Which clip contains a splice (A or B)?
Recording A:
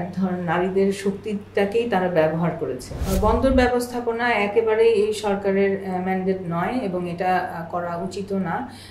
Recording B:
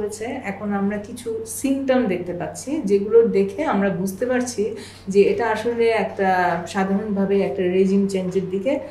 A